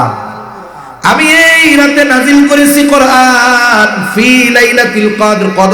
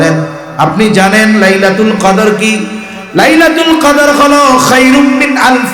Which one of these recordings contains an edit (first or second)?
second